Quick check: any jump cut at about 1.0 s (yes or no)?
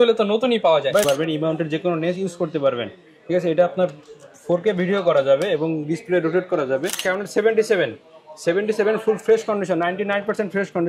yes